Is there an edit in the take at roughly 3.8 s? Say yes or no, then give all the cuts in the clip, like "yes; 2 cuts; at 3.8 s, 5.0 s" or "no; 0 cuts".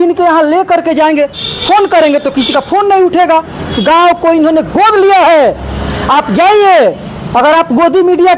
yes; 1 cut; at 3.8 s